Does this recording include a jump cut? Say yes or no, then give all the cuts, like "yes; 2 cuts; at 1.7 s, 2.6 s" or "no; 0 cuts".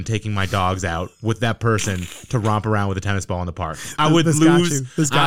no; 0 cuts